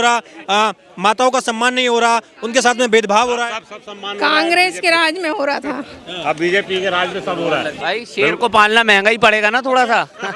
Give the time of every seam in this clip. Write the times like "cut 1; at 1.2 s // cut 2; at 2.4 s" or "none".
cut 1; at 7.7 s